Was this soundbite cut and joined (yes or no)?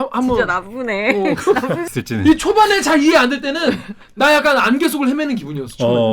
yes